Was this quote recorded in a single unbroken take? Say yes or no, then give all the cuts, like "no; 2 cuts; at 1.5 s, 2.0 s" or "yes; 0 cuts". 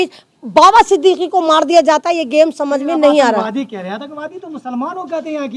yes; 0 cuts